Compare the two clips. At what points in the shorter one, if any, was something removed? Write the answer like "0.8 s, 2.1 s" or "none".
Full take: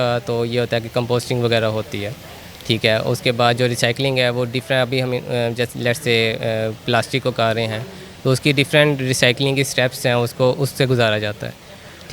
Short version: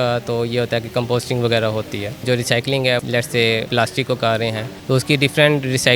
2.2 s, 3.5 s, 4.7 s